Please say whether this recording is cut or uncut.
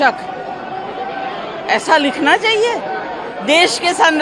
uncut